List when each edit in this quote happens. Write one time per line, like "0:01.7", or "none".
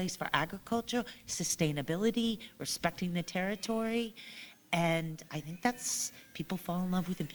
none

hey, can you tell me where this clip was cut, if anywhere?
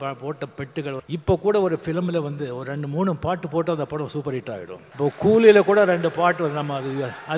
0:01.0
0:04.8

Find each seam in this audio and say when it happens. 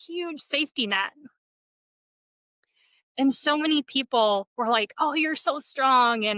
none

